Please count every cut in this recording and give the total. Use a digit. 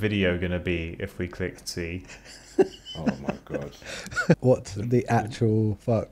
1